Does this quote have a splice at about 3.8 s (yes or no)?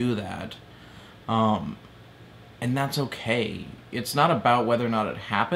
no